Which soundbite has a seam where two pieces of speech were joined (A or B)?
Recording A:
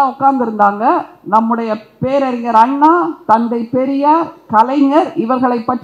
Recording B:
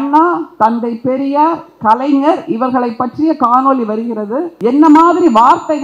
B